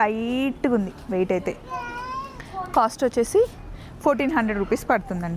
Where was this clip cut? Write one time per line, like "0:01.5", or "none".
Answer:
none